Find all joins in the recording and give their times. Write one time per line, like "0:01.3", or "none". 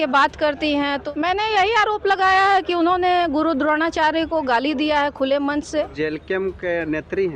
0:01.0
0:05.9